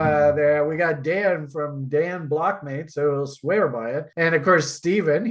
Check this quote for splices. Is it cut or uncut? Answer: cut